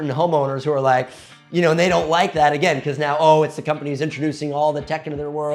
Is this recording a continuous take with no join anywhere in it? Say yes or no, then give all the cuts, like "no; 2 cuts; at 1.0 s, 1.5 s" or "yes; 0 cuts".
yes; 0 cuts